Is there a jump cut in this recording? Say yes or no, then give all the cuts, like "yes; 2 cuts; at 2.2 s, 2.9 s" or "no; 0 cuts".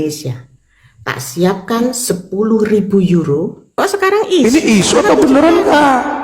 yes; 1 cut; at 3.6 s